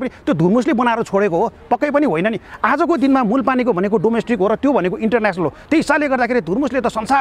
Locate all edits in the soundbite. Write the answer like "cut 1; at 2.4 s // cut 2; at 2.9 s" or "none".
none